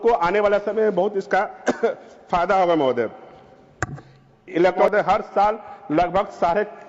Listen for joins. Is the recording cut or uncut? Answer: cut